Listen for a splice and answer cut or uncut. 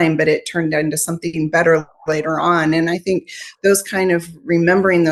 uncut